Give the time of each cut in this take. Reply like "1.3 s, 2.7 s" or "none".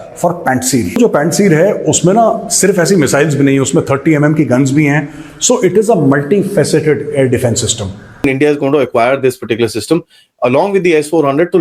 1.0 s, 8.2 s

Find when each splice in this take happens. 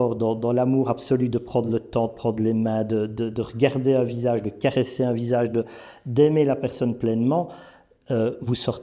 none

